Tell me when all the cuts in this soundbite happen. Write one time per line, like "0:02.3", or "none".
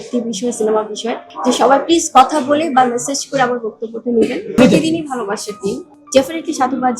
0:01.2
0:04.4
0:05.8